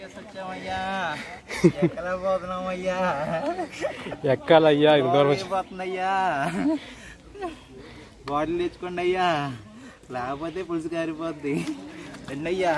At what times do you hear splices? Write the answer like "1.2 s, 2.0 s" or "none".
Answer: none